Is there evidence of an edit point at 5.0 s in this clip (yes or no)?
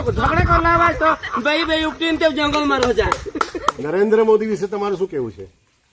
no